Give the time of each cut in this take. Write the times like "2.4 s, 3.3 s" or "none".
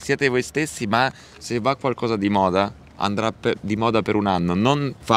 none